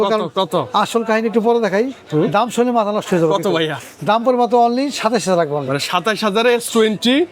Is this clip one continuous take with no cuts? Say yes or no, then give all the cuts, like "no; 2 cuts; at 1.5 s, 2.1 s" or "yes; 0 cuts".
yes; 0 cuts